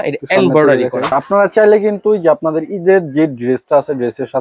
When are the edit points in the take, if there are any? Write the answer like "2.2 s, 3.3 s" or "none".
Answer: 1.6 s